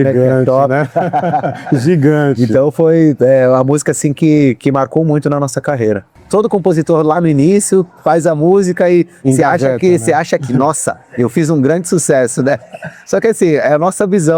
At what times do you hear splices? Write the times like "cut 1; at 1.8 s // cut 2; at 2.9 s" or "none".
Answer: cut 1; at 6.2 s